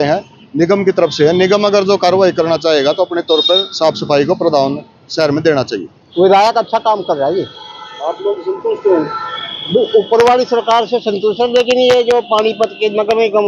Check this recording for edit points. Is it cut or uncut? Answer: cut